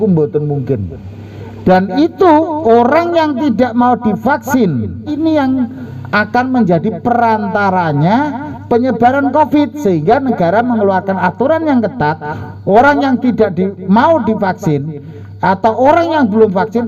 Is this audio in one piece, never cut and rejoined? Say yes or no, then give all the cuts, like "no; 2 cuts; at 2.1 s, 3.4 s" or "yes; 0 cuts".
no; 1 cut; at 5.2 s